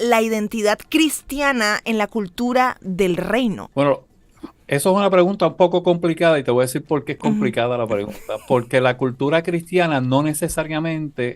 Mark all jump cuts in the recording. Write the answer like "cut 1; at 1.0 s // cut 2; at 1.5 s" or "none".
cut 1; at 0.8 s // cut 2; at 3.6 s

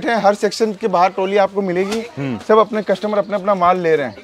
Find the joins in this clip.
none

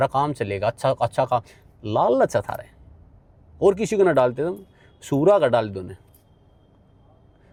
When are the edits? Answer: none

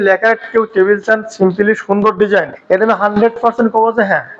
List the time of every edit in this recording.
cut 1; at 2.5 s

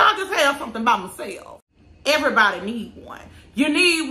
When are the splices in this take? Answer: cut 1; at 1.5 s

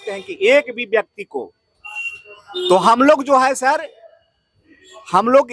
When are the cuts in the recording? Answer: none

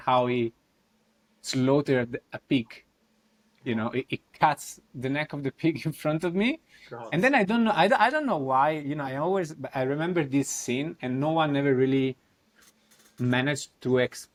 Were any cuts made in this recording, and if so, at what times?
none

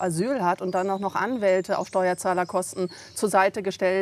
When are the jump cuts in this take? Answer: none

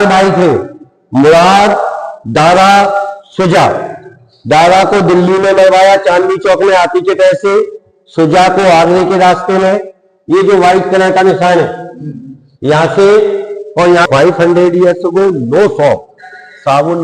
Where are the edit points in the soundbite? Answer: cut 1; at 14.1 s

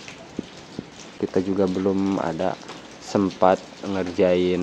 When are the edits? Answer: cut 1; at 1.1 s

